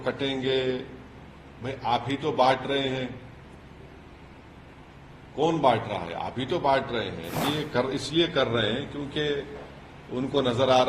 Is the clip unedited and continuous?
no; 1 cut; at 7.4 s

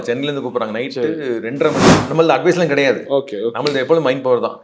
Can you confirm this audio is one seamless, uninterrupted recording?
no; 1 cut; at 2.1 s

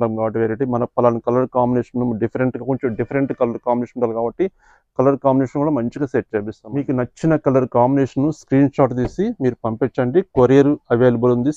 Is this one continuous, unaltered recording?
no; 1 cut; at 6.6 s

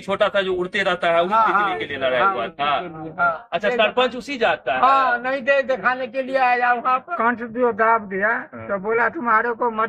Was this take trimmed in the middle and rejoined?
yes; 2 cuts; at 3.4 s, 7.1 s

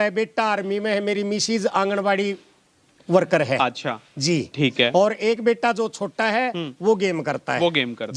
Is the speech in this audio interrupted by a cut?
no; 0 cuts

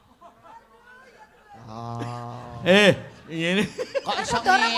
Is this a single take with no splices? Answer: yes; 0 cuts

